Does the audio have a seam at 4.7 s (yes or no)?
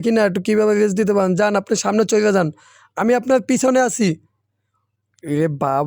yes